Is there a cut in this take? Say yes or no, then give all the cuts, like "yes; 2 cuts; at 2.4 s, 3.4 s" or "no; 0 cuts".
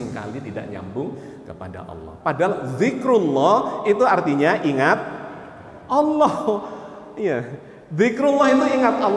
no; 0 cuts